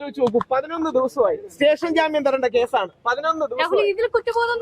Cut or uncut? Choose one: uncut